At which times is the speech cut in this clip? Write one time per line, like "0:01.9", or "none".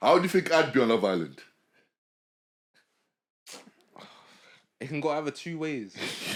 none

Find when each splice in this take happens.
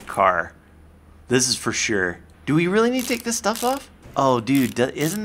0:02.3
0:04.0

